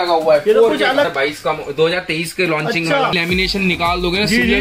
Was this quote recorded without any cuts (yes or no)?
no